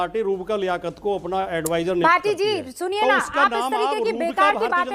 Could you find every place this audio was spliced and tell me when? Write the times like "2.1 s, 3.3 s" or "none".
none